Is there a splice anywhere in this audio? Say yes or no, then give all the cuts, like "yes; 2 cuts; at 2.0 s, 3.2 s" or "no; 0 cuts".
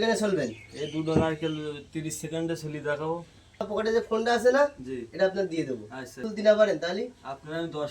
yes; 2 cuts; at 3.7 s, 6.3 s